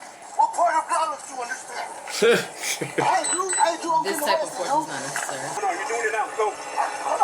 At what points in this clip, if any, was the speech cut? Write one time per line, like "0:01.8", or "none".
0:05.5